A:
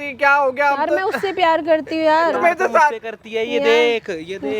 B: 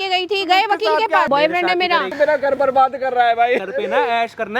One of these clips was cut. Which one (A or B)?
B